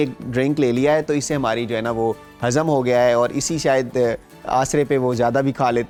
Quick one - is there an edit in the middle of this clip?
no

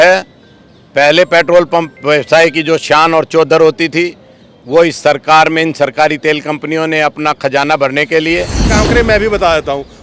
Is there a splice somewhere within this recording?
yes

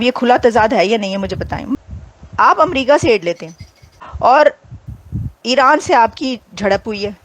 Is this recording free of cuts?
no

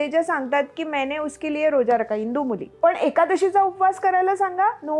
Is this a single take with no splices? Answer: no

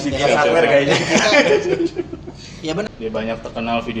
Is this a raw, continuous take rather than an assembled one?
no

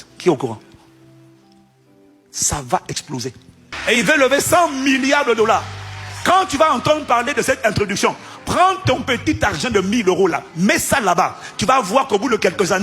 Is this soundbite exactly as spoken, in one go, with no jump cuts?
no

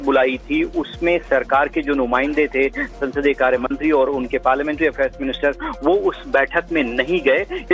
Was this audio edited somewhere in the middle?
no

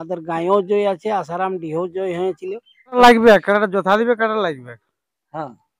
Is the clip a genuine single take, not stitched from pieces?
no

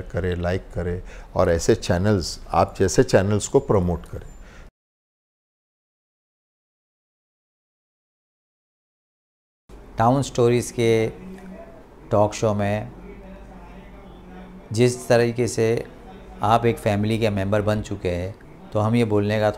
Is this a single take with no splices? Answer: yes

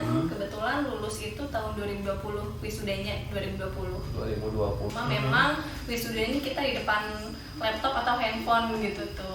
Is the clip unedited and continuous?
no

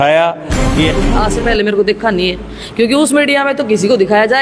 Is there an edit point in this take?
yes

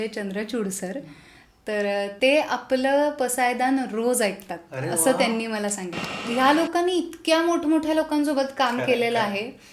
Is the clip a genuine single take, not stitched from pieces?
no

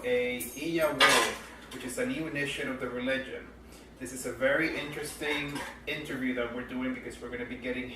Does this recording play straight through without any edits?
no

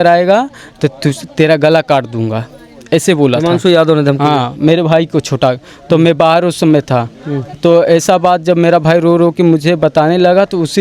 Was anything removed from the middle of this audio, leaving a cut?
no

